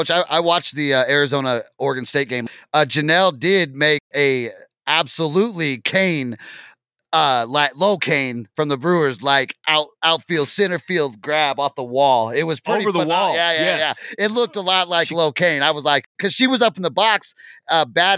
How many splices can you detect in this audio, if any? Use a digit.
1